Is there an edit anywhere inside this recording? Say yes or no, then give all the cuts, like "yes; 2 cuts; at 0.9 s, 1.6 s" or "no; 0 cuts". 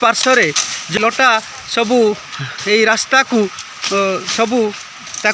yes; 1 cut; at 0.9 s